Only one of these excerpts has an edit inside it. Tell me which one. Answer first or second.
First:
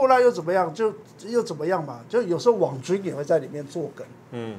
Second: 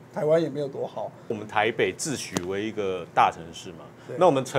second